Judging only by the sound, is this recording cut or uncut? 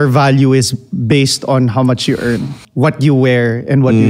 cut